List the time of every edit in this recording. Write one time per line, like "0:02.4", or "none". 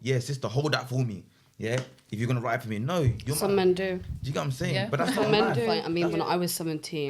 0:05.8